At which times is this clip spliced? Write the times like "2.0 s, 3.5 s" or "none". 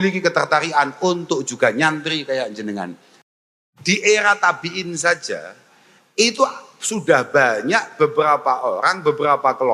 3.2 s